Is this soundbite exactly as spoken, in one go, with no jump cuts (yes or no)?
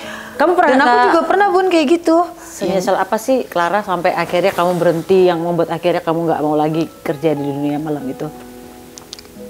no